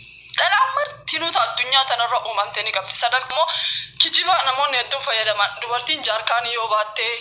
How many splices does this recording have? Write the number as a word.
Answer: one